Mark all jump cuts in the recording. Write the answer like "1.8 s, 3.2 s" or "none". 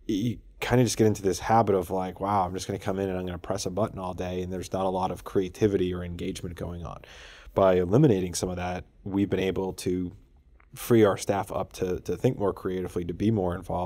none